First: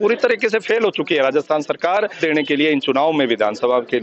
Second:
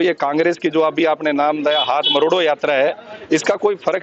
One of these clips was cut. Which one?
first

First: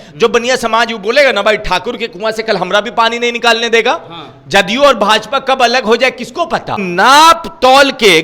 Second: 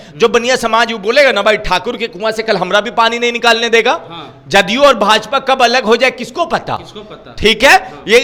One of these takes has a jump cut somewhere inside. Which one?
first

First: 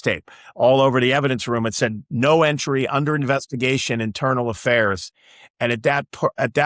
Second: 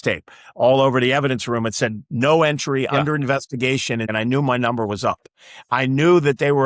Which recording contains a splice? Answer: second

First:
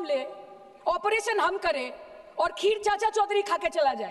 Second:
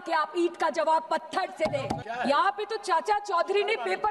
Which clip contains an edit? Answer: second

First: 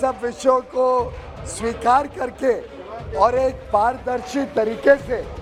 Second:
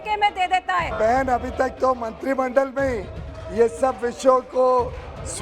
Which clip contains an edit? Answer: second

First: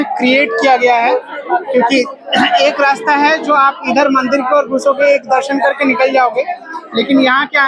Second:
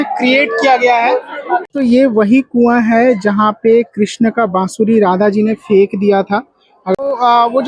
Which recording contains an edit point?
second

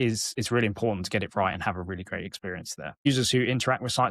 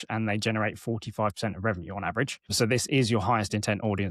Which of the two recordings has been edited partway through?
first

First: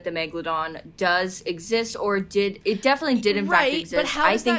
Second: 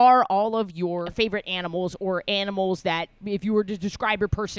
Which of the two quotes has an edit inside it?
second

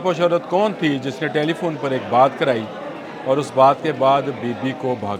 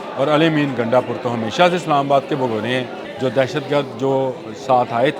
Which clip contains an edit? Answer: second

